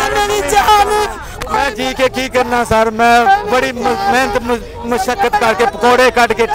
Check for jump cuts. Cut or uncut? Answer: uncut